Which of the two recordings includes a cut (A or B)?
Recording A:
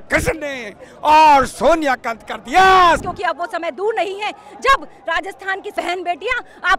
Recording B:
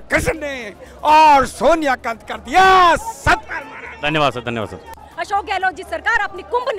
A